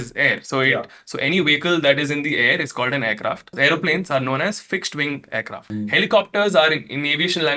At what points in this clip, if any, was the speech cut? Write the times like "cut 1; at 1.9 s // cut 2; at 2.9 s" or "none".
cut 1; at 3.5 s // cut 2; at 5.6 s